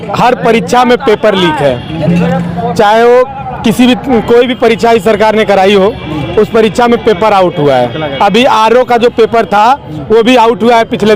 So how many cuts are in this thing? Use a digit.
0